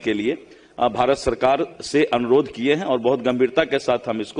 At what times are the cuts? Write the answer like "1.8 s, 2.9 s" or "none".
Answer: none